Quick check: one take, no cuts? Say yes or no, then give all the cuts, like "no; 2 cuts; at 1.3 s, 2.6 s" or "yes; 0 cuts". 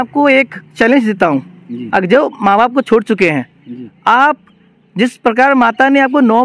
yes; 0 cuts